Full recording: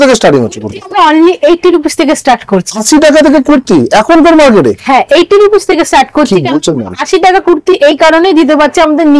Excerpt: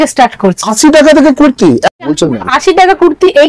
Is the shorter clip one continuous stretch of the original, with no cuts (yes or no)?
no